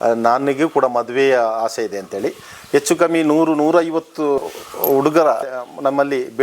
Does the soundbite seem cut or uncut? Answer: cut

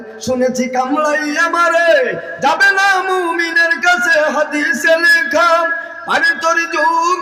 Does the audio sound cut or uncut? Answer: uncut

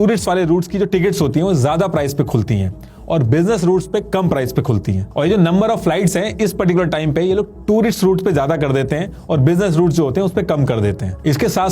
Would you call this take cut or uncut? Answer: uncut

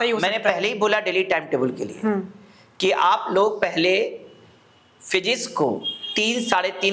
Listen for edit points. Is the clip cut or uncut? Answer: uncut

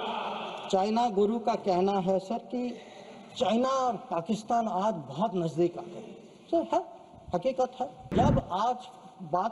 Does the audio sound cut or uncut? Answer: cut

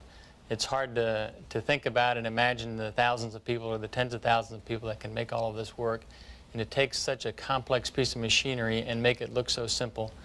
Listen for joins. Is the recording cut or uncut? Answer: cut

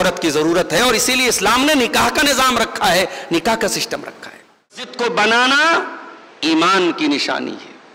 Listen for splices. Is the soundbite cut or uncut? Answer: cut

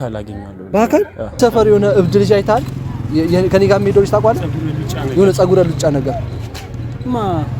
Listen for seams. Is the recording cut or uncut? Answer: cut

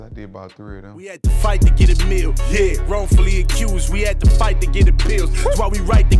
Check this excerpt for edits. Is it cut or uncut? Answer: cut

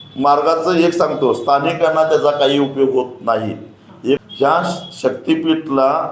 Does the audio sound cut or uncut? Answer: cut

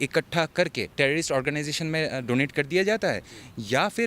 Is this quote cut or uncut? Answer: cut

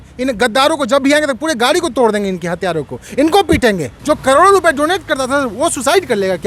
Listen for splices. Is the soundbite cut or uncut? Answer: cut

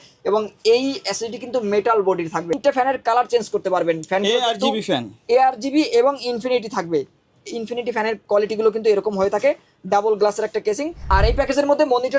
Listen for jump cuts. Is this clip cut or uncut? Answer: cut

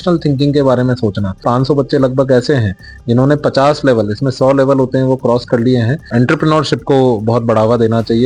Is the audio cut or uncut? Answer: cut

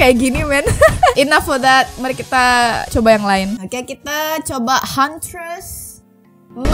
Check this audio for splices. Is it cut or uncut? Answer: uncut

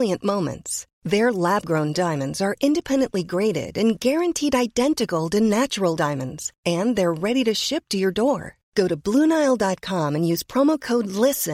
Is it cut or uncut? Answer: uncut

